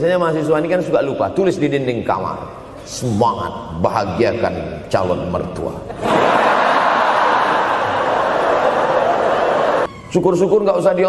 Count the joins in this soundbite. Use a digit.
1